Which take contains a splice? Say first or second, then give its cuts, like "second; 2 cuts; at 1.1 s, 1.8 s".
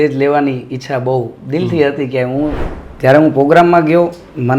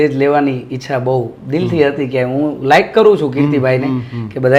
first; 1 cut; at 2.6 s